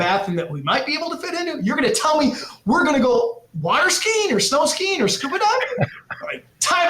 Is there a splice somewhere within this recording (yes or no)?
no